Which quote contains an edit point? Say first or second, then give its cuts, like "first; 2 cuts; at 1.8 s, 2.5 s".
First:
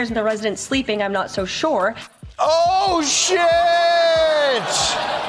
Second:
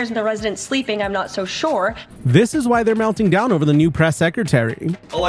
second; 1 cut; at 2.1 s